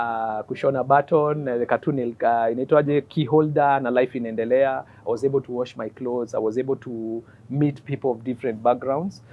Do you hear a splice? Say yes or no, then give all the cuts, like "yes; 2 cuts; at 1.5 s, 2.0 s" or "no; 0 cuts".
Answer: no; 0 cuts